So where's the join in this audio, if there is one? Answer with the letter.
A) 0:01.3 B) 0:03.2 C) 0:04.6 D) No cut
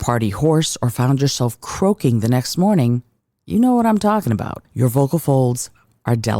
C